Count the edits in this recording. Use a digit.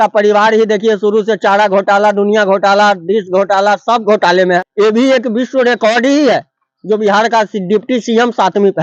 1